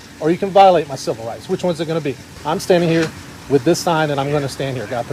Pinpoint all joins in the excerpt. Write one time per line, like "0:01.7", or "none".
0:02.3